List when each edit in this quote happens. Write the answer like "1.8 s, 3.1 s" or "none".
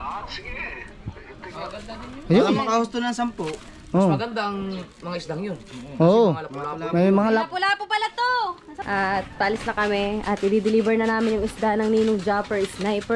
8.7 s